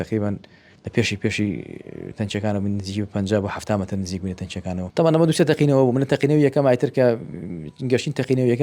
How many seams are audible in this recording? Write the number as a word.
one